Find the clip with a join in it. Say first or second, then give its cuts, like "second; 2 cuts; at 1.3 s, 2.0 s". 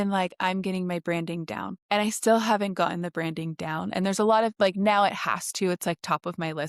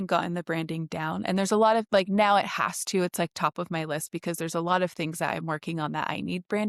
first; 1 cut; at 1.7 s